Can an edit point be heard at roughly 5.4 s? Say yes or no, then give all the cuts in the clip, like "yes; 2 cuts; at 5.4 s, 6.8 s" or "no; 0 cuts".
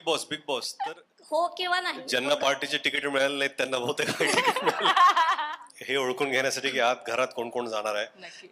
yes; 2 cuts; at 0.8 s, 5.4 s